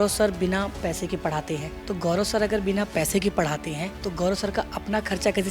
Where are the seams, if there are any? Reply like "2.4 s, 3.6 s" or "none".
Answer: 1.7 s, 3.9 s